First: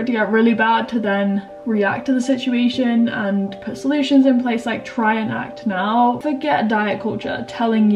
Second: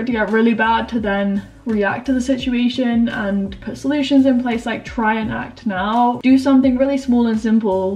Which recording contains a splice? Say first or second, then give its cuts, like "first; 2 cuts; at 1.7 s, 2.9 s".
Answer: first; 1 cut; at 6.2 s